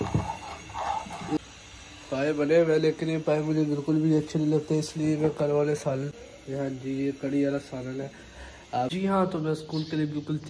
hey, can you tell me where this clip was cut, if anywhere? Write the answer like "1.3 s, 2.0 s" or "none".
1.4 s, 6.1 s, 8.9 s